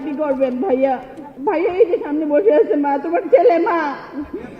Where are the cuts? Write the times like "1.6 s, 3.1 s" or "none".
1.2 s